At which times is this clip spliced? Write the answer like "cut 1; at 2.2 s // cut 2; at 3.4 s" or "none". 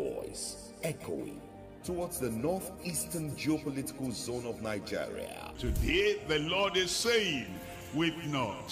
cut 1; at 5.3 s